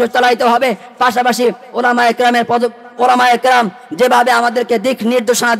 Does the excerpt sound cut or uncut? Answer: uncut